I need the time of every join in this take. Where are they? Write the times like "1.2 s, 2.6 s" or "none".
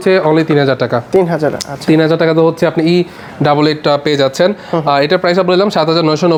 none